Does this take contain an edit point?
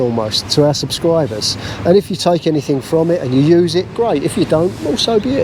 no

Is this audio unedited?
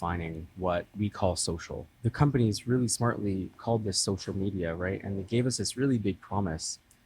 no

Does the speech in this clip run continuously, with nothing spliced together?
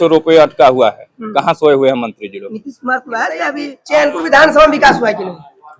no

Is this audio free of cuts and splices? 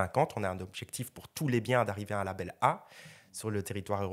yes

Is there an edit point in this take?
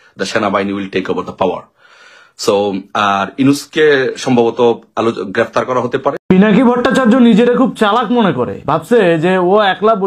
yes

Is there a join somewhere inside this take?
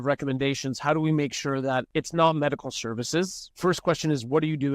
yes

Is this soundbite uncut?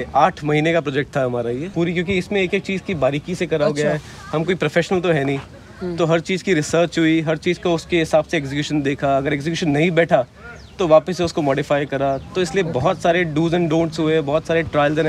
yes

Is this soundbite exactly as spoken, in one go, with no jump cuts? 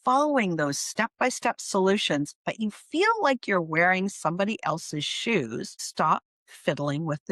yes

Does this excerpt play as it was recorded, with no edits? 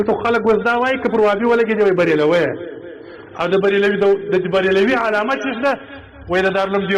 yes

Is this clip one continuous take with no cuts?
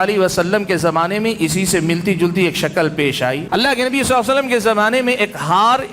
no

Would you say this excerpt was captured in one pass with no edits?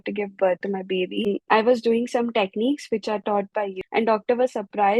no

